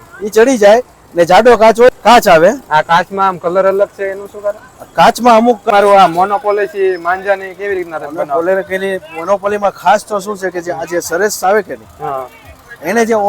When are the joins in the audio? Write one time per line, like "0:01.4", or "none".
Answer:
0:01.9
0:05.7